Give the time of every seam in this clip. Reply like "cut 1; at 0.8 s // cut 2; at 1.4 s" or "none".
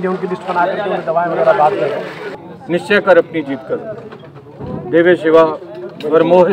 cut 1; at 2.3 s